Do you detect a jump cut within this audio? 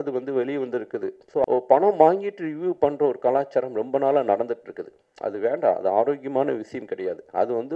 yes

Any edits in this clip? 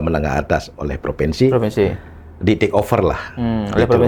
no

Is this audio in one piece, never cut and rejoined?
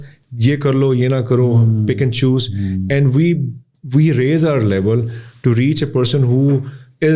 yes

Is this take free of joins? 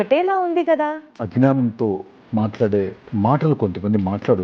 no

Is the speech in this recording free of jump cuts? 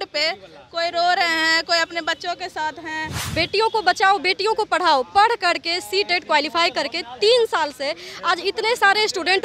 no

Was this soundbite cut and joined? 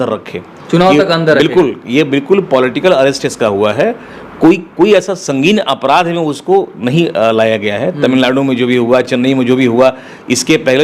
no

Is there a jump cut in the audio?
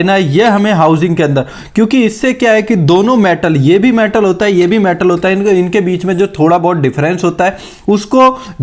no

